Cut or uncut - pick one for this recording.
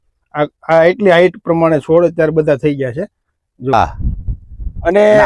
cut